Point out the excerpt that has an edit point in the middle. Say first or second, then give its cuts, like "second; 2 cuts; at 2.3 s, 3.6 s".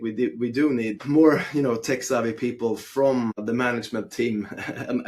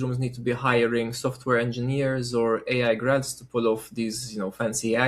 first; 2 cuts; at 1.0 s, 3.4 s